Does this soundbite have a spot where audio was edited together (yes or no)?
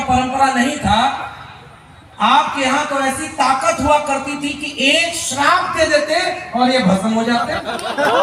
no